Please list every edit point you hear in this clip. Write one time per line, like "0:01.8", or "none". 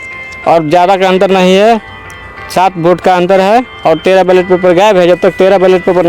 none